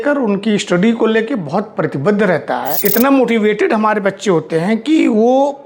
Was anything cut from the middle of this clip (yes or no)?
yes